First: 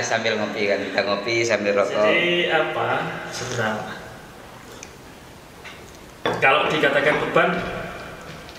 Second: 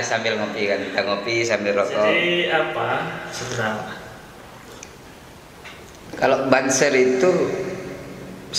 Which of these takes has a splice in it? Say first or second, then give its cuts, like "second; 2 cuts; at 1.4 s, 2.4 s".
second; 1 cut; at 6.1 s